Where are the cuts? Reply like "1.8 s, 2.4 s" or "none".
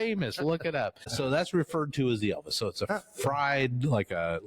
1.1 s